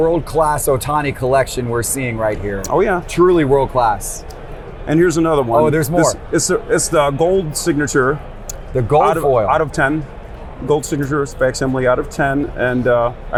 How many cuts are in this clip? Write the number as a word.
zero